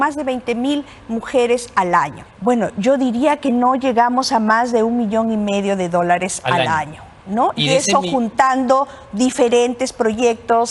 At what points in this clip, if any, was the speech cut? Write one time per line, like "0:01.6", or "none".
0:02.2